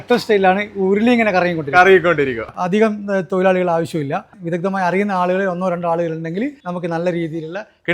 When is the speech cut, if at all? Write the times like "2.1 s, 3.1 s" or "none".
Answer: 2.4 s, 4.4 s, 6.6 s

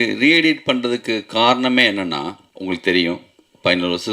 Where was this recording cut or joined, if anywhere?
2.5 s

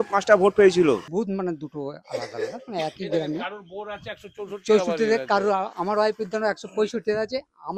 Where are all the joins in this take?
1.1 s

